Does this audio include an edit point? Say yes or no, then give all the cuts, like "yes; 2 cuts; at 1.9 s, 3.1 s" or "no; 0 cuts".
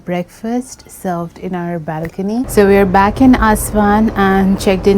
yes; 1 cut; at 2.5 s